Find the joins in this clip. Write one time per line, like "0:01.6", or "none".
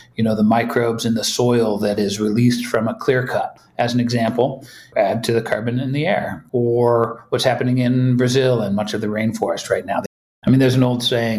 0:06.4
0:10.1

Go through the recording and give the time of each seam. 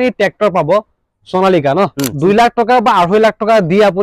0:02.1

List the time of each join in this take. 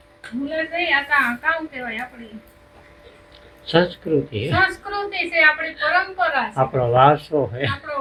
none

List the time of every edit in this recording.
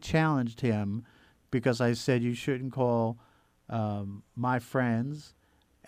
none

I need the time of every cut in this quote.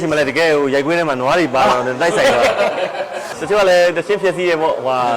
0:03.3

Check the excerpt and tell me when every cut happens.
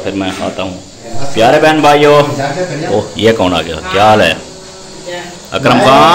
0:01.1

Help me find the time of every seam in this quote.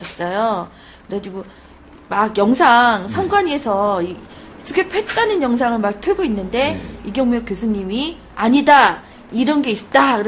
0:08.1

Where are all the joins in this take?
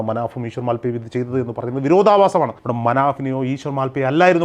0:02.6

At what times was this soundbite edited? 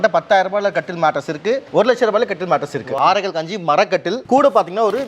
0:01.6
0:02.9

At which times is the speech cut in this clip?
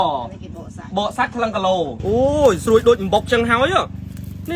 0:02.0

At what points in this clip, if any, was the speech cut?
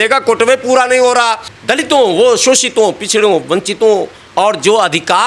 0:01.5

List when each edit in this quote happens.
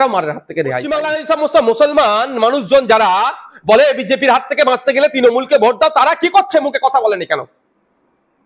0:00.9

